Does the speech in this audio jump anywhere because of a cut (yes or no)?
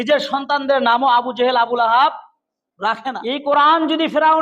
yes